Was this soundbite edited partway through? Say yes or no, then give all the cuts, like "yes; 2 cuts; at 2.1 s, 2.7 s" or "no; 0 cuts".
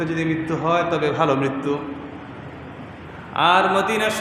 no; 0 cuts